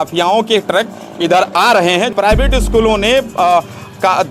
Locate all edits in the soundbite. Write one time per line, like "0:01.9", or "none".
0:02.1